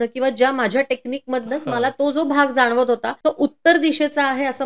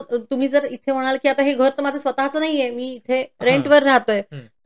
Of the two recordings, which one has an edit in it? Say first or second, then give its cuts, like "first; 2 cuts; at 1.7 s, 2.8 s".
first; 1 cut; at 3.1 s